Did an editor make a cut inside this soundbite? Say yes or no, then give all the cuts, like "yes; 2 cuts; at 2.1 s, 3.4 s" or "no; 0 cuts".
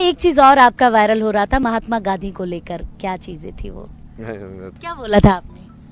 no; 0 cuts